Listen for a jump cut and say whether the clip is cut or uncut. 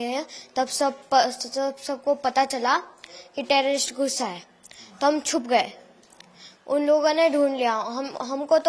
uncut